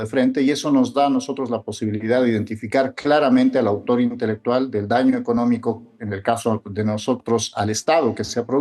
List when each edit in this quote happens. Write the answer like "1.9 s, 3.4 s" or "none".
none